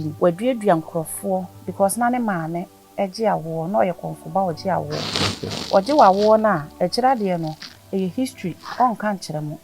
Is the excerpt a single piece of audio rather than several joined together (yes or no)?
no